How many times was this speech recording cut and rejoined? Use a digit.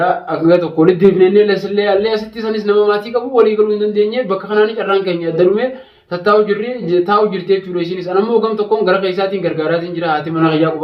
0